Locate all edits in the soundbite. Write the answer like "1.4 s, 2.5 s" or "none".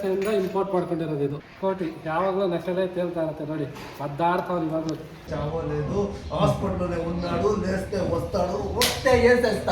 1.5 s, 5.3 s